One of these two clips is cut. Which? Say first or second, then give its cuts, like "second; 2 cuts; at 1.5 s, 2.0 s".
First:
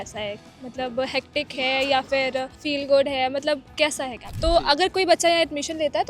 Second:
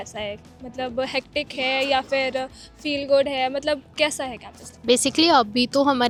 first; 2 cuts; at 2.6 s, 4.3 s